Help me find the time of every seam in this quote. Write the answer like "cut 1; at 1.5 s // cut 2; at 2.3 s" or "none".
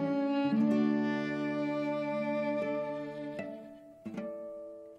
none